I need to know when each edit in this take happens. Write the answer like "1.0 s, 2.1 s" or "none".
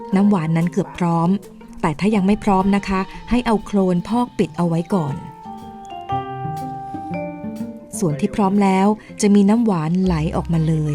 7.9 s